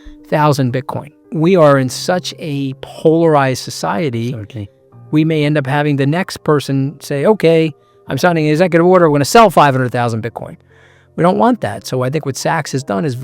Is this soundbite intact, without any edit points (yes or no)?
no